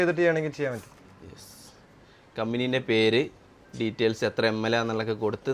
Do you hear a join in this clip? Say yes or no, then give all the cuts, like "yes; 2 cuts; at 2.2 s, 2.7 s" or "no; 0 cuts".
no; 0 cuts